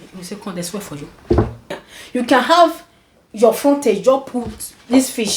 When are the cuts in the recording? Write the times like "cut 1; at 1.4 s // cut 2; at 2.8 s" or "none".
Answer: cut 1; at 1.7 s